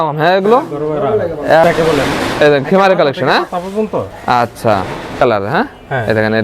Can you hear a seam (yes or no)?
yes